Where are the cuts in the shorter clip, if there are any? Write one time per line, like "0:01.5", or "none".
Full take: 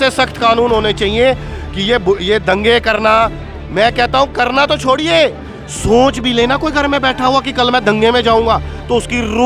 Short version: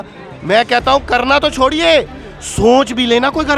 none

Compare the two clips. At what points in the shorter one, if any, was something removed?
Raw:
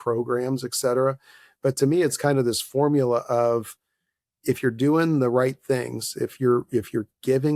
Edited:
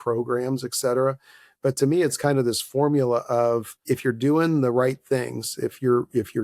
0:03.7

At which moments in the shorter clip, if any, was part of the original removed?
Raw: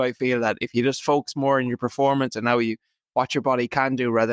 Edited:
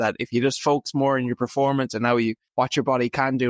0:02.4

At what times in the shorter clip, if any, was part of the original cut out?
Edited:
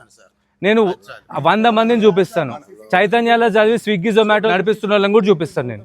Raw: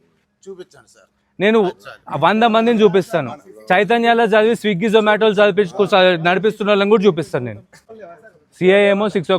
0:04.5

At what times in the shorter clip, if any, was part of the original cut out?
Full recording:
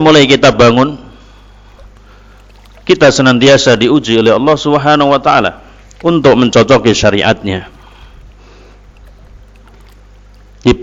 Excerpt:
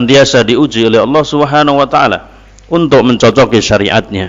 none

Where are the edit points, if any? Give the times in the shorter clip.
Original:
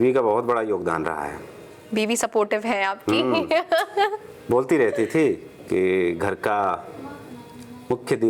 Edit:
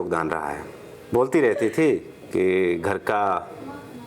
0:00.9

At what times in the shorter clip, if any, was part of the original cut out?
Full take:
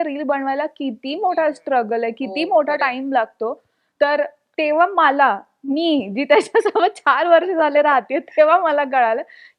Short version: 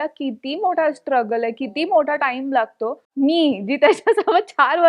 0:03.0

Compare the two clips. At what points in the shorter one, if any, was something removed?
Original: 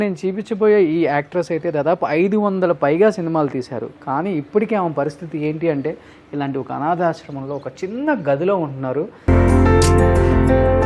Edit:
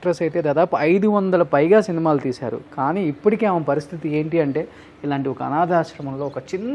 none

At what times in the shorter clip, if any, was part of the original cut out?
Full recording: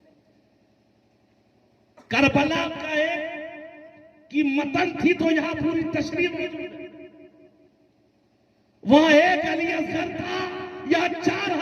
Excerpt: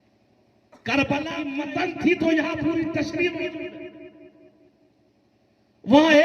0:01.5

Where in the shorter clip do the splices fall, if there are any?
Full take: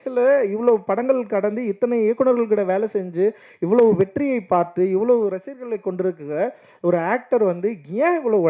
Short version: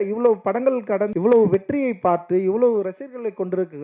0:01.1

